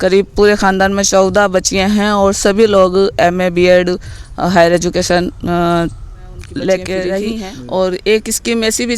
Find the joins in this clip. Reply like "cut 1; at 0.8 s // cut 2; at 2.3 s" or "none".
cut 1; at 7.4 s